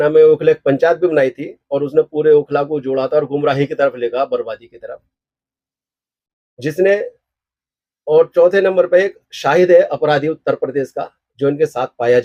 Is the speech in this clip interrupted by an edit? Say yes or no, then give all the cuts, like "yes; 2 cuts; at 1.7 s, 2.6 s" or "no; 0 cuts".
no; 0 cuts